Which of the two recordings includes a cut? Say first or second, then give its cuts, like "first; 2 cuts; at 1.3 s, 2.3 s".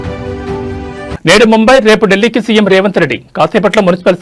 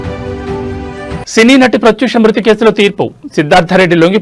second; 1 cut; at 1.1 s